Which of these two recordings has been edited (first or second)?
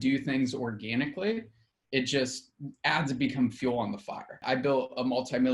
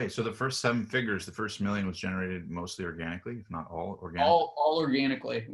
first